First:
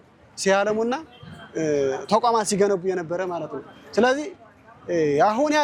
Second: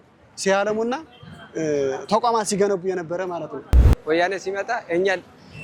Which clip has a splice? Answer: second; 1 cut; at 3.8 s

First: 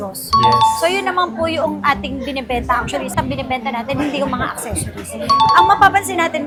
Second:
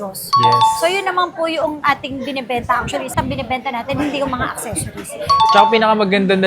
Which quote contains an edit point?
second; 1 cut; at 5.5 s

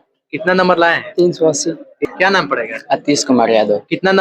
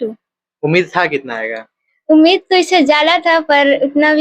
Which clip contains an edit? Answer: first; 1 cut; at 2.1 s

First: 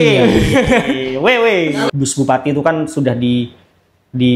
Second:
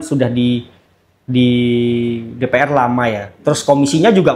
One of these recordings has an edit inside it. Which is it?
first; 1 cut; at 1.9 s

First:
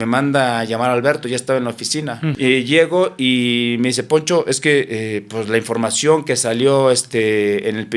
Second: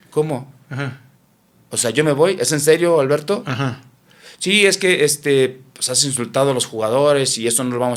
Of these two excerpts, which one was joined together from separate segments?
first; 1 cut; at 2.3 s

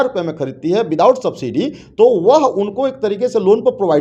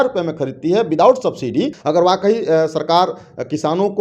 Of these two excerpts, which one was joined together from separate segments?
second; 1 cut; at 1.8 s

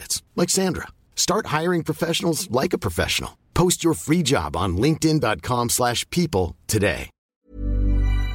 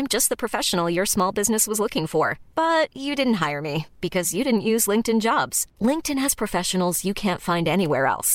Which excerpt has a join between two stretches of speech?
first; 1 cut; at 7.3 s

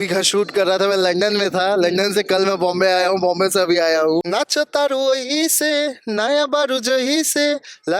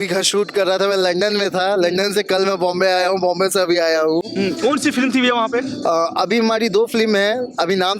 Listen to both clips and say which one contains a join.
first; 1 cut; at 4.3 s

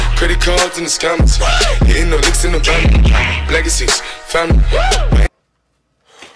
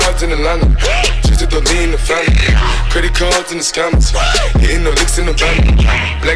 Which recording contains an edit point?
first; 1 cut; at 5.4 s

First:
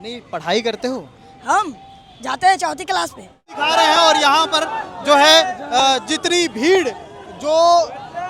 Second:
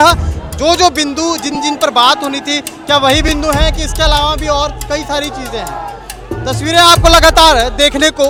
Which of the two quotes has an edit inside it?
first; 1 cut; at 3.5 s

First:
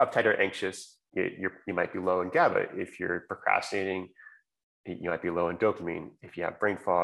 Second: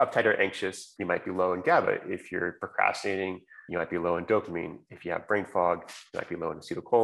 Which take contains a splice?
second; 2 cuts; at 0.9 s, 3.5 s

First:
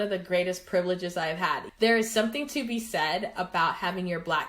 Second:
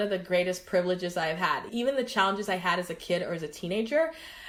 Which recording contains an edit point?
first; 1 cut; at 1.7 s

